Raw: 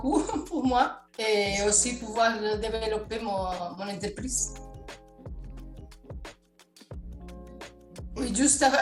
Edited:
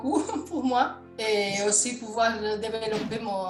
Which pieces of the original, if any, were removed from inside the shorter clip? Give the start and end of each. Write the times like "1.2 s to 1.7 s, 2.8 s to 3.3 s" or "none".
none